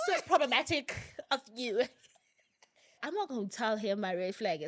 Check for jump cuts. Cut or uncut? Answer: cut